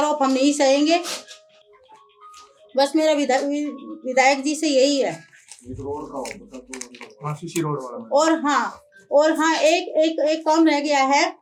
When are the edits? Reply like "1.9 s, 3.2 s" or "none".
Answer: none